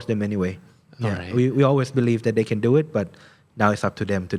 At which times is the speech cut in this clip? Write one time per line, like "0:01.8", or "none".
none